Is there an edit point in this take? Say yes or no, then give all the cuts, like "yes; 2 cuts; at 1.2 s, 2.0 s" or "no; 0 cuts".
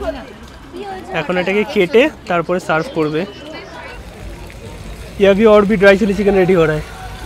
yes; 1 cut; at 3.9 s